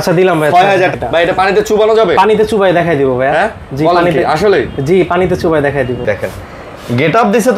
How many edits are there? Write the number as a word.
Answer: two